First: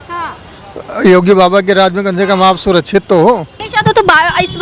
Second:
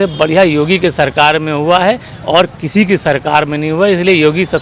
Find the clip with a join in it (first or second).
first